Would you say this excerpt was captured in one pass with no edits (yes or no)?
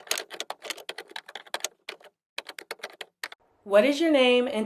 no